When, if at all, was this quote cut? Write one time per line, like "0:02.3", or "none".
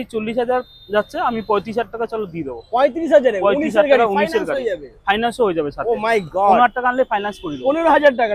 none